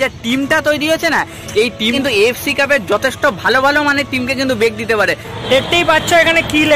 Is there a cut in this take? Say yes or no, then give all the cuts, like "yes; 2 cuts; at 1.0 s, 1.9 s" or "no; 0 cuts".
yes; 2 cuts; at 1.9 s, 5.3 s